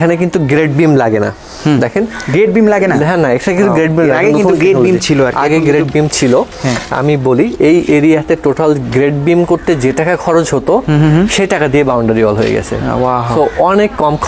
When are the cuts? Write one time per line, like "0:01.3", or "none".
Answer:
none